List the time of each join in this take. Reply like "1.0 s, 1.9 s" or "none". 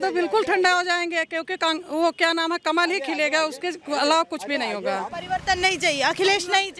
5.2 s